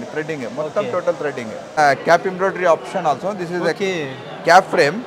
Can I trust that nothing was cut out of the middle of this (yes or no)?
no